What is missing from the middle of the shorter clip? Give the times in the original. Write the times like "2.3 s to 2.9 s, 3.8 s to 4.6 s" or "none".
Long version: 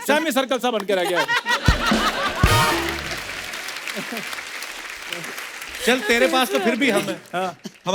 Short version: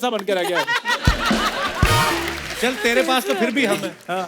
3.1 s to 5.7 s

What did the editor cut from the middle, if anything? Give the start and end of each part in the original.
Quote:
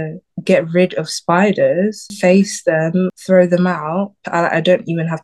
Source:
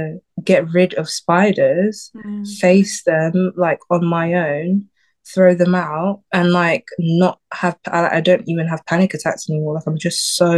2.1 s to 2.5 s, 3.5 s to 5.2 s, 6.3 s to 7.8 s

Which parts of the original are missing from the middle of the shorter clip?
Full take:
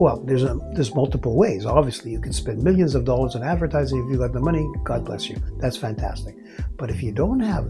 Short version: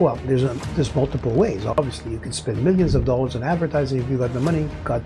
none

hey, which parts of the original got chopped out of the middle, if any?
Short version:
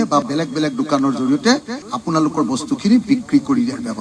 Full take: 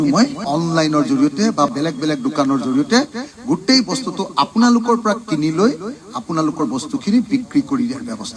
3.3 s to 6.0 s

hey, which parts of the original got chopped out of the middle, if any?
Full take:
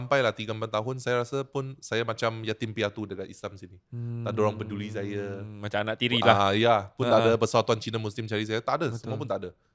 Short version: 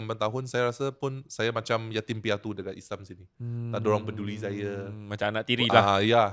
none

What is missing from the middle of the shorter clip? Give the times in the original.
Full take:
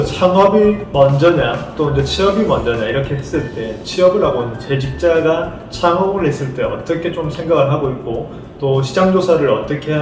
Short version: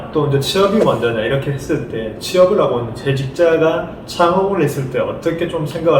none

